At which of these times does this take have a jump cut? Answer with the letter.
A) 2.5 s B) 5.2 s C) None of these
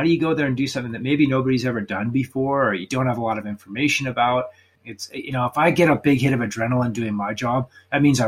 C